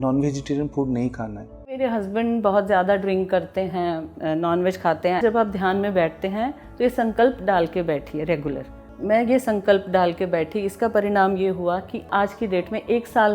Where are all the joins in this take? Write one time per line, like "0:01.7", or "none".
0:01.8
0:05.2
0:08.9
0:12.1